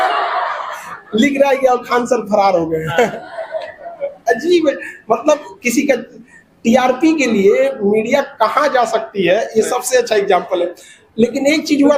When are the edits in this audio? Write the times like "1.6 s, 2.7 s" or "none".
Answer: none